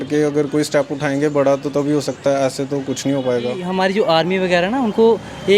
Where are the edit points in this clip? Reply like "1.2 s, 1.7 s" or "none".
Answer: 3.6 s